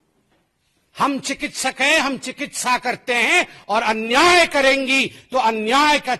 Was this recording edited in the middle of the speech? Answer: no; 0 cuts

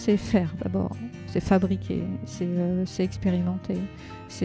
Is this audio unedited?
yes; 0 cuts

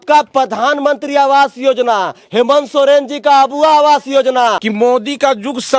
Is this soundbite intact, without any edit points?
no; 1 cut; at 4.6 s

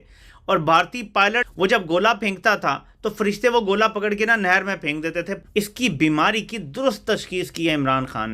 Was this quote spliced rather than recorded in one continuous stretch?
yes; 2 cuts; at 1.5 s, 5.4 s

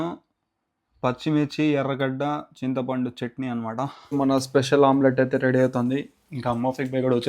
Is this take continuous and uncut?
no; 1 cut; at 4.0 s

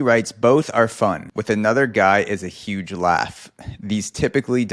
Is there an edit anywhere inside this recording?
yes; 1 cut; at 1.3 s

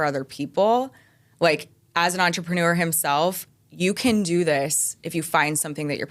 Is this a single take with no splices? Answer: yes; 0 cuts

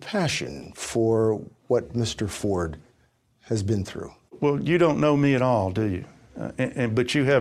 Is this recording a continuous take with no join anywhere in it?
no; 1 cut; at 4.4 s

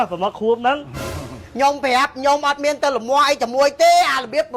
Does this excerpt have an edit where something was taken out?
yes; 1 cut; at 1.4 s

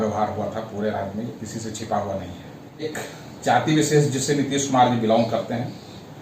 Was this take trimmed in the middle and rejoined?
yes; 1 cut; at 2.9 s

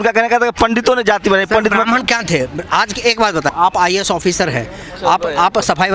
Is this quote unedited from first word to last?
no; 1 cut; at 3.5 s

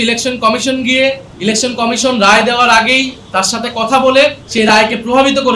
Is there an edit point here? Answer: yes; 2 cuts; at 1.3 s, 4.4 s

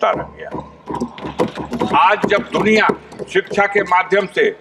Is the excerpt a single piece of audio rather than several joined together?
yes; 0 cuts

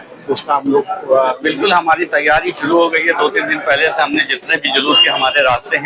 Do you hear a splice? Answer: yes; 1 cut; at 1.4 s

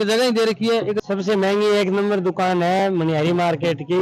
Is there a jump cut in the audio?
yes; 1 cut; at 1.0 s

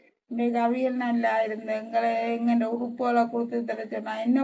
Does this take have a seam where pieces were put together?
no; 0 cuts

